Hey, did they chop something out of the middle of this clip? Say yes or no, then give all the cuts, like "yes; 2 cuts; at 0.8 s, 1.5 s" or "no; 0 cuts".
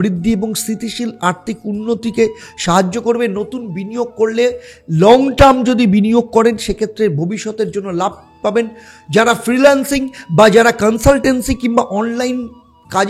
no; 0 cuts